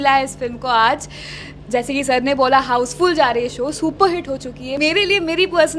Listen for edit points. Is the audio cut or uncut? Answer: cut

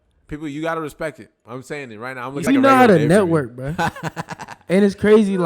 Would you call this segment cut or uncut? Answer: cut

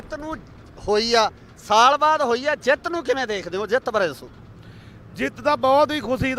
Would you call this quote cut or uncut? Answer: cut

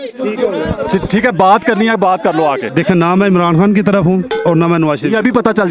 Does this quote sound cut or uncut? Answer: cut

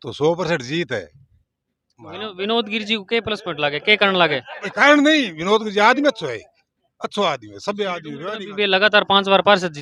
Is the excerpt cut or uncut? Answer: uncut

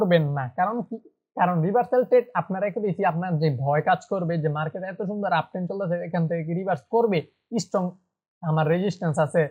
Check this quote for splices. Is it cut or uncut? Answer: uncut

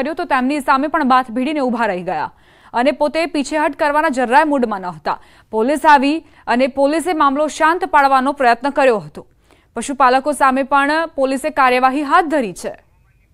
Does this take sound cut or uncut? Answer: uncut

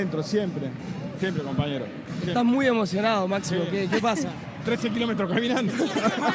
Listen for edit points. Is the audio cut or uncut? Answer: uncut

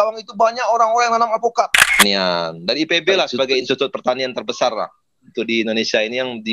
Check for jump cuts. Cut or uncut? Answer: cut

